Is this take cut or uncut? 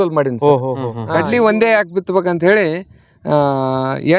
cut